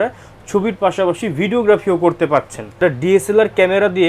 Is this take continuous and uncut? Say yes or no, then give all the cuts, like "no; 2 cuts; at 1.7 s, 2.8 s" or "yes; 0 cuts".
no; 1 cut; at 2.8 s